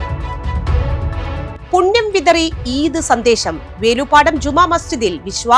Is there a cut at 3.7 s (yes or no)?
no